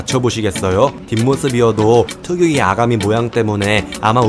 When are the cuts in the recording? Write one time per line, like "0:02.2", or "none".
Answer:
0:01.0